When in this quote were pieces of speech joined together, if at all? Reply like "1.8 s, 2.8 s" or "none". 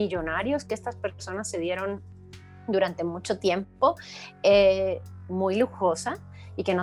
none